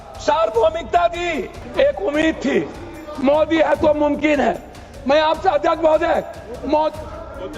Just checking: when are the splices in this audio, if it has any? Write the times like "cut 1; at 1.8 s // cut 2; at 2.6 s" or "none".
cut 1; at 1.6 s